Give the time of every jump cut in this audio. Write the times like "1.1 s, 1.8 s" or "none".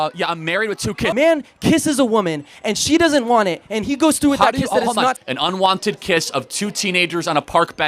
1.1 s, 5.2 s